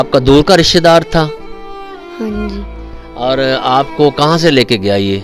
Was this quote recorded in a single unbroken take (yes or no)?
yes